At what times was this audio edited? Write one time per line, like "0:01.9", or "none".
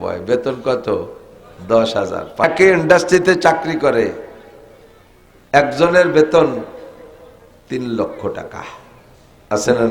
0:02.4